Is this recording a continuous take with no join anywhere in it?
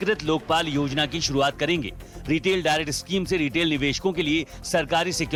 yes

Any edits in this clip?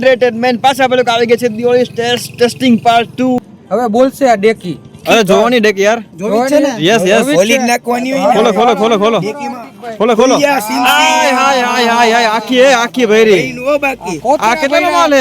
yes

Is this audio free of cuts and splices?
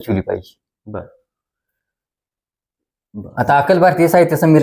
yes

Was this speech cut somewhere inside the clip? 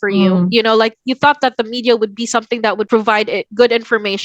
yes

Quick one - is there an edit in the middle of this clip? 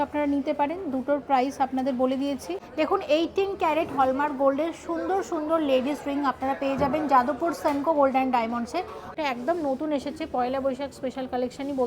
yes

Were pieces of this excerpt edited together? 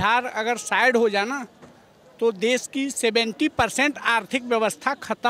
no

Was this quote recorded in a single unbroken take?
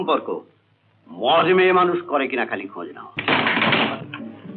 no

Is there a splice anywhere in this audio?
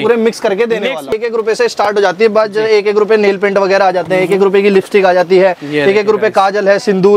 yes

